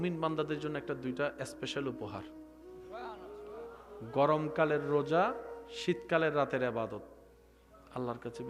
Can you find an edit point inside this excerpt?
no; 0 cuts

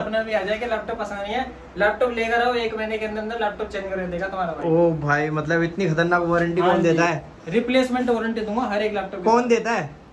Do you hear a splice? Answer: no; 0 cuts

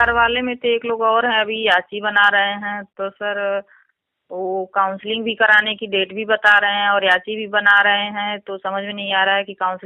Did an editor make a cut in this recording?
no; 0 cuts

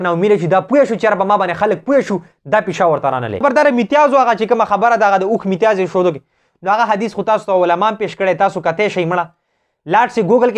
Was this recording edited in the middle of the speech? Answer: yes; 1 cut; at 3.4 s

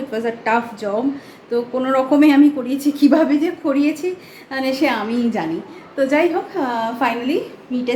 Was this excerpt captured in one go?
yes; 0 cuts

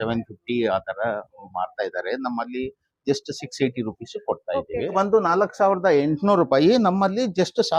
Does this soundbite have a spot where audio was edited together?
yes; 1 cut; at 4.9 s

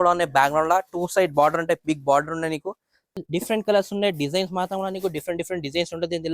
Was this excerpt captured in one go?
no; 1 cut; at 3.2 s

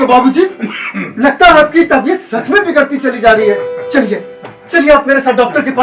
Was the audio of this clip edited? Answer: no; 0 cuts

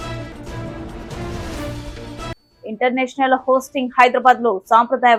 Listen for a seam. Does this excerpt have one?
no; 0 cuts

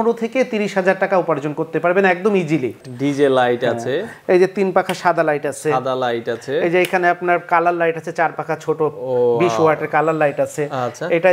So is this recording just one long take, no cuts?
no; 1 cut; at 2.9 s

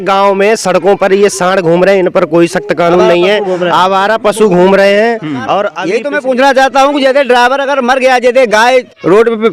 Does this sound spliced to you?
yes; 1 cut; at 5.8 s

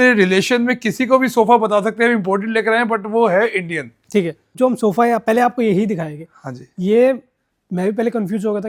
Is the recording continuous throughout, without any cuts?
yes; 0 cuts

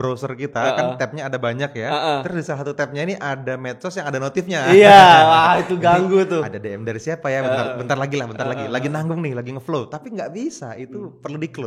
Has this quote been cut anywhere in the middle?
no; 0 cuts

